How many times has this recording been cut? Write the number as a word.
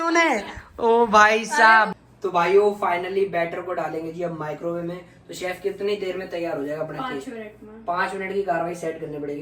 one